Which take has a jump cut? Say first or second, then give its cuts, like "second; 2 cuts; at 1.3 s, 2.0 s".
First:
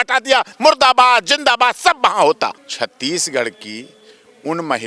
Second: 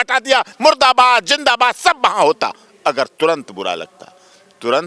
first; 1 cut; at 2.6 s